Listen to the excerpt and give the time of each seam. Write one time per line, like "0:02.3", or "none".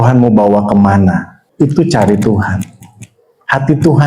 0:01.4

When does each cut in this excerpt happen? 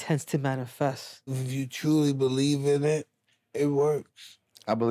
0:01.4

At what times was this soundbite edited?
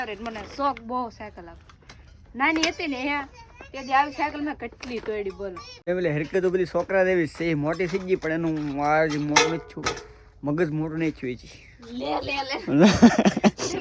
0:05.7

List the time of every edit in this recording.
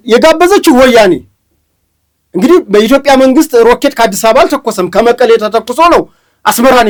none

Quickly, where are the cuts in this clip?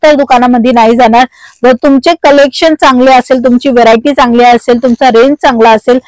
none

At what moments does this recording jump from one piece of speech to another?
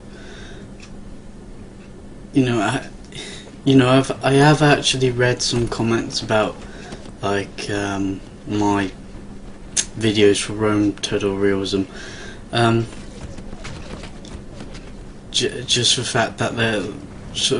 0:03.3

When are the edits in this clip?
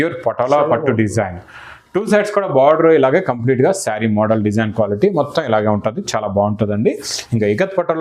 none

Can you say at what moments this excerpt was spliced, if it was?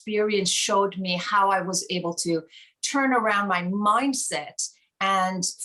none

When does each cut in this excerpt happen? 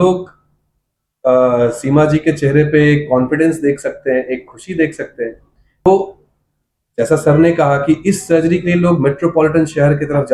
none

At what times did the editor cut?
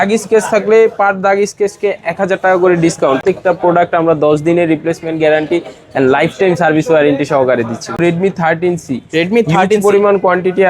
0:03.2
0:08.0

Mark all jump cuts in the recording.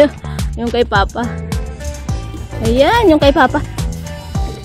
0:01.3
0:02.6
0:03.7

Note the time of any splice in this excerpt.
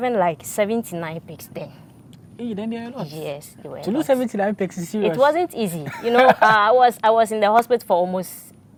none

